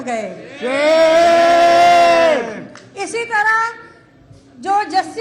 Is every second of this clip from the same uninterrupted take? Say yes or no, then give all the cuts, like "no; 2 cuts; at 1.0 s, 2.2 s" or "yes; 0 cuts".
yes; 0 cuts